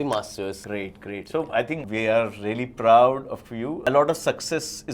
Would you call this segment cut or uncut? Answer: uncut